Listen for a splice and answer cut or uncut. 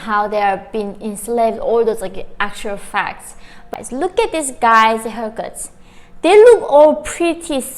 cut